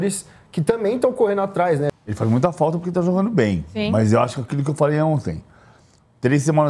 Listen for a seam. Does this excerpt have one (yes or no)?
yes